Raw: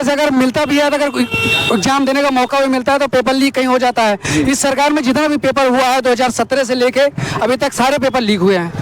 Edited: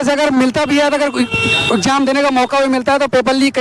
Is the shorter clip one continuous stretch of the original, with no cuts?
yes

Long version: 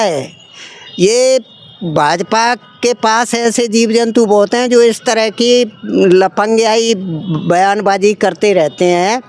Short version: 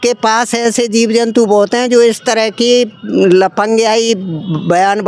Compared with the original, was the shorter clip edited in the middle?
no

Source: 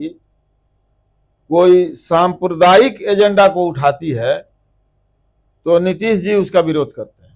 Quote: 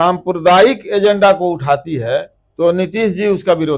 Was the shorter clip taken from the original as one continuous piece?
no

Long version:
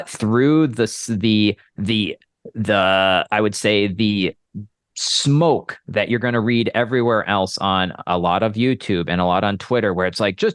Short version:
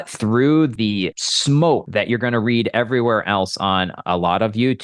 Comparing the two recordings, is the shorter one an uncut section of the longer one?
no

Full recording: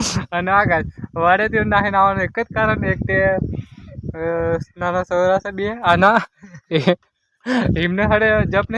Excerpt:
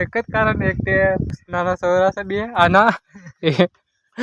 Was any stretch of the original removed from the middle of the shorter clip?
yes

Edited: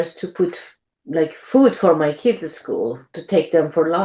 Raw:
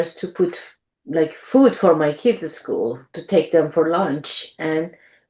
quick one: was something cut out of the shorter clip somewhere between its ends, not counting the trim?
no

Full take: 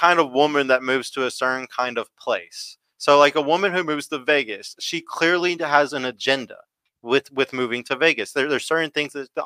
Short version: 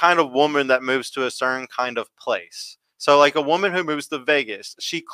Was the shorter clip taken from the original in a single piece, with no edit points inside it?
yes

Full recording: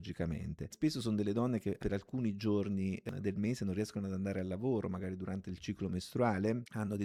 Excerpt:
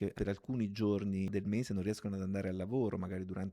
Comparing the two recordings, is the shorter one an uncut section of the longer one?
no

